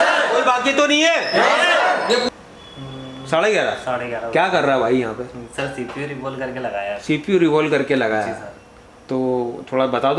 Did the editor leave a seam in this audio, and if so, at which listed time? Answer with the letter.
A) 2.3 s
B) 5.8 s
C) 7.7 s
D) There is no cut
A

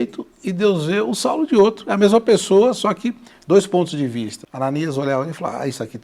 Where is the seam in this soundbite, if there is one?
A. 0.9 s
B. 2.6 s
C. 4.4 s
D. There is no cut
C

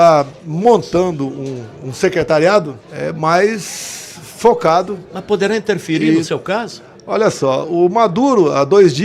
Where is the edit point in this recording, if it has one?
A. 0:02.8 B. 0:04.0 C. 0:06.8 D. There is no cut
A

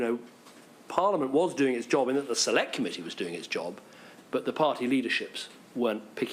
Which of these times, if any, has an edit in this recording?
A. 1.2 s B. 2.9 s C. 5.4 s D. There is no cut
B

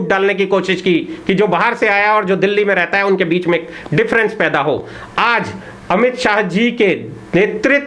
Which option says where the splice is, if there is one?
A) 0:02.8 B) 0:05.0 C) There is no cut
C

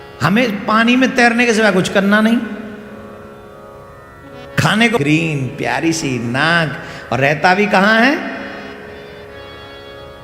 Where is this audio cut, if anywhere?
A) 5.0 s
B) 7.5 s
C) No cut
A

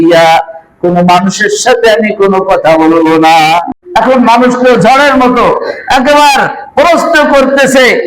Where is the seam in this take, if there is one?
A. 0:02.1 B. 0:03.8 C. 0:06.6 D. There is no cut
B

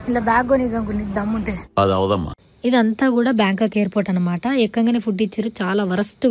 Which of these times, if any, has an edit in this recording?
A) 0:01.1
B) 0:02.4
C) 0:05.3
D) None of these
B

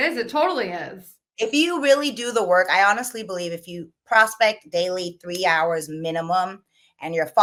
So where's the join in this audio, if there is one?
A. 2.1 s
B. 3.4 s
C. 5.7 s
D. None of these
D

